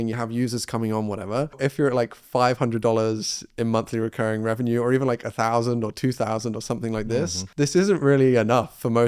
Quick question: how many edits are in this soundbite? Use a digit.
2